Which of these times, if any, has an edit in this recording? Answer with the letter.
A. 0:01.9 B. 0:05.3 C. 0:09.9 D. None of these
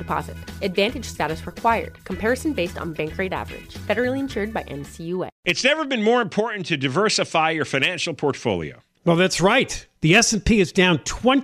B